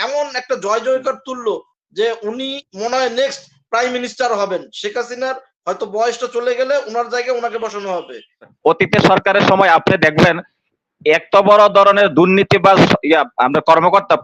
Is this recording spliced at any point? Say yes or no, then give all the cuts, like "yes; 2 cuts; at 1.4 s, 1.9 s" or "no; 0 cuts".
yes; 1 cut; at 8.5 s